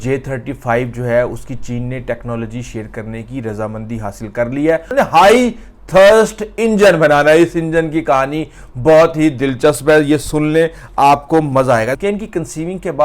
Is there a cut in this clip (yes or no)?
yes